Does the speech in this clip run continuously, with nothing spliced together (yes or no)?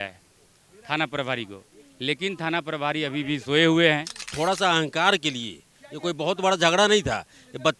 no